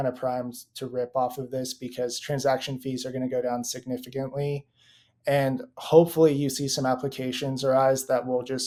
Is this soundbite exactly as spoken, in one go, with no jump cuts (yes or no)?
yes